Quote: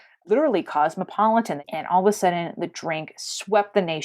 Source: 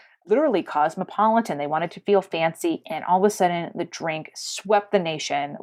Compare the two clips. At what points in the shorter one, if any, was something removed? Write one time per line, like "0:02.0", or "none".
0:01.6